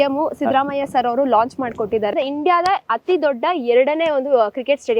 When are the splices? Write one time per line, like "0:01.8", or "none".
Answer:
0:02.1